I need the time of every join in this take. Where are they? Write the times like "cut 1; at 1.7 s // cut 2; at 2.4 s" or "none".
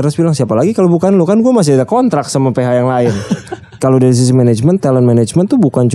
cut 1; at 3.8 s